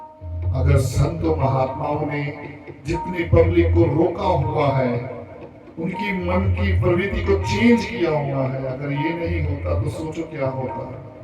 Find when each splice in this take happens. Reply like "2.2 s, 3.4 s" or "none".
none